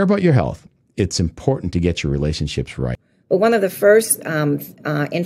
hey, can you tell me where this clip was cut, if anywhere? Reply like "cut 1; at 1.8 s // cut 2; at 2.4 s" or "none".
cut 1; at 3.1 s